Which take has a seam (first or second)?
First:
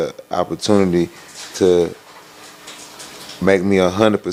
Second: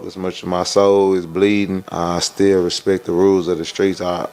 second